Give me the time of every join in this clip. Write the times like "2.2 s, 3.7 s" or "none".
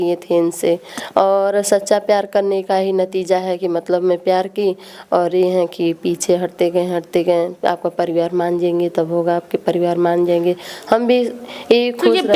none